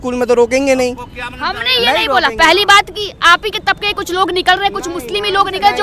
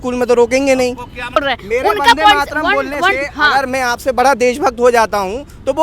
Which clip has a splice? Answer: second; 1 cut; at 1.4 s

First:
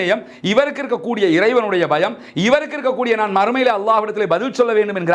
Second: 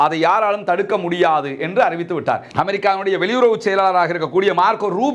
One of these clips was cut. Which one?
second; 1 cut; at 2.5 s

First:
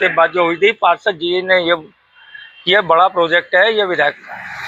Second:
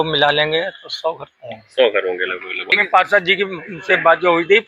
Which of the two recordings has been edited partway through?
second; 1 cut; at 2.7 s

